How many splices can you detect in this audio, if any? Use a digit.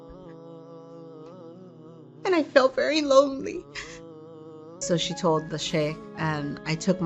1